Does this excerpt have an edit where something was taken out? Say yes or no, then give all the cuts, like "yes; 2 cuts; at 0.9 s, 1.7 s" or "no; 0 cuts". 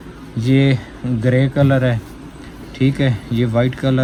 no; 0 cuts